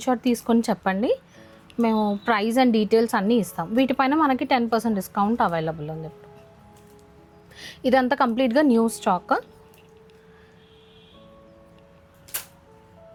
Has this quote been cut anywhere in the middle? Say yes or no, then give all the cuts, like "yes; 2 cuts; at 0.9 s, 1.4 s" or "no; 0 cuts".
no; 0 cuts